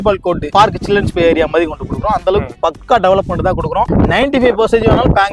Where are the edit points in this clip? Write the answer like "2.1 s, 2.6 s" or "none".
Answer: 3.9 s